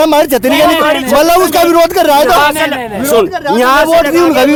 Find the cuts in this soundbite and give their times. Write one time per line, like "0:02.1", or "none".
none